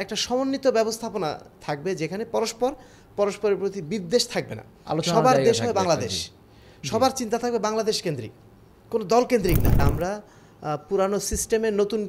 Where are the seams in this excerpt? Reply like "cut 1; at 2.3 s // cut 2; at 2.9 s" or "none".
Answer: cut 1; at 9.8 s